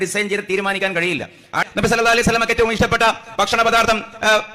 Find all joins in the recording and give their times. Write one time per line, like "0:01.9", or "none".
0:01.6